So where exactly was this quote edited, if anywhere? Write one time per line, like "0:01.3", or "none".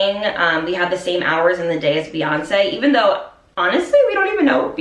none

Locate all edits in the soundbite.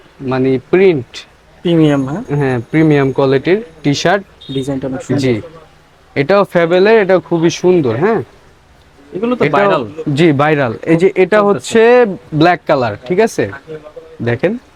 none

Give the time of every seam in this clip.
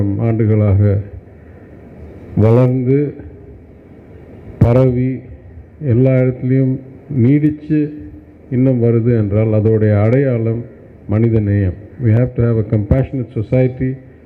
none

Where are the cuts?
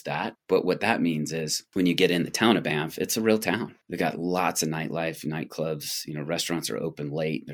none

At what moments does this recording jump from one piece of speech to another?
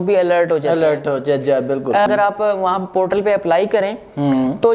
0:02.1

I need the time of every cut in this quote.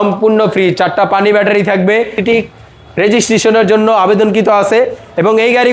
0:02.2

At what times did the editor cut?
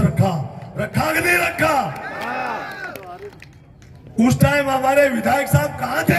none

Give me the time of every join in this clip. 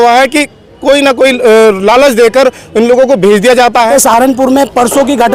0:03.9

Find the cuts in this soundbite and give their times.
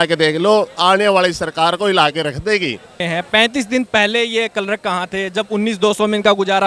0:03.0

